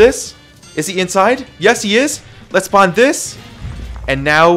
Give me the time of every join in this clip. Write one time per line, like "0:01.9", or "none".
none